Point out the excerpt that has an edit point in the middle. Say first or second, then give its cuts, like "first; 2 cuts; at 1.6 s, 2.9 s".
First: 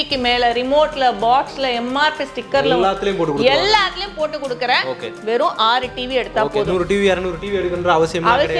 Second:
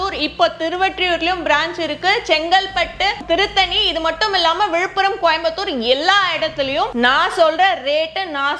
second; 2 cuts; at 3.2 s, 6.9 s